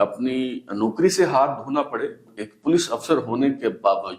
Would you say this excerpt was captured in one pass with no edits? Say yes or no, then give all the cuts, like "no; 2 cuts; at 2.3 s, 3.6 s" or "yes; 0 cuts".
no; 1 cut; at 2.3 s